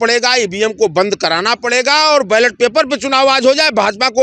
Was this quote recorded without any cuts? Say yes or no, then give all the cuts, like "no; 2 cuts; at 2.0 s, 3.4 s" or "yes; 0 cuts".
yes; 0 cuts